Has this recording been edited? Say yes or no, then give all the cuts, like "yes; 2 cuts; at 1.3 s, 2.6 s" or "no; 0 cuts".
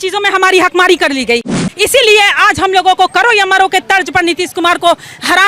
yes; 1 cut; at 1.6 s